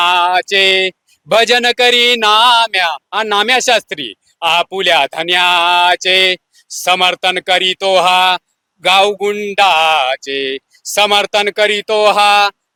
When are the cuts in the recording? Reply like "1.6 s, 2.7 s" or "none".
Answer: none

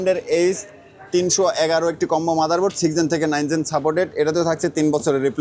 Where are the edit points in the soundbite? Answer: none

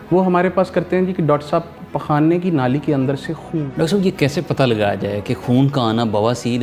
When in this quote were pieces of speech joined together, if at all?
3.5 s

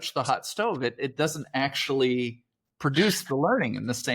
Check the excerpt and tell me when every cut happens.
none

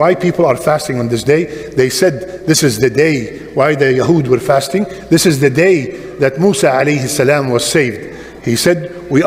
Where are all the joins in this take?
none

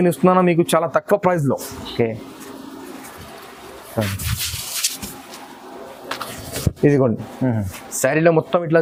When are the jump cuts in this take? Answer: none

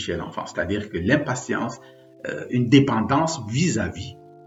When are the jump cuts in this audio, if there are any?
none

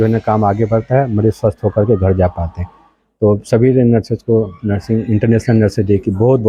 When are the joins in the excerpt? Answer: none

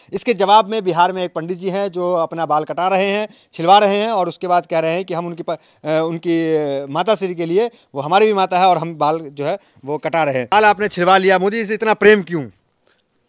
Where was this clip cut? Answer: none

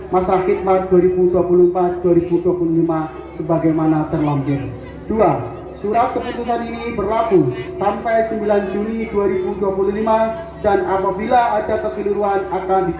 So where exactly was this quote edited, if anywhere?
none

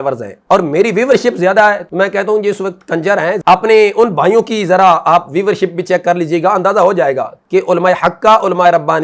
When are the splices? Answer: 1.8 s, 3.4 s

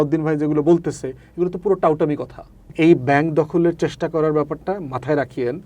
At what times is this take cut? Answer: 2.7 s

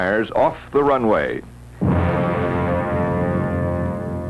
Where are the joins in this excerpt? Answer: 1.3 s

